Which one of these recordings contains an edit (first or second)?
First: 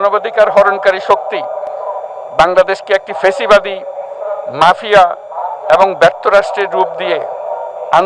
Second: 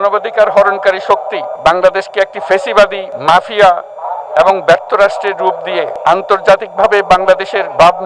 second